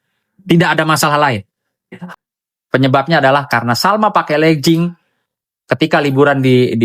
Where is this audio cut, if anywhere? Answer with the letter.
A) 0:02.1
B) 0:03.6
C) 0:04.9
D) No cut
A